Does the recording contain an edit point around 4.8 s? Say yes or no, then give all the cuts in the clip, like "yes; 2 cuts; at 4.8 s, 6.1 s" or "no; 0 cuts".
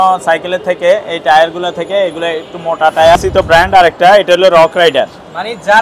no; 1 cut; at 3.2 s